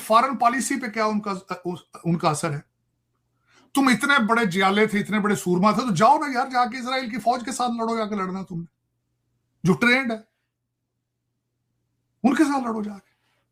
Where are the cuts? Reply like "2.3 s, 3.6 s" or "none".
none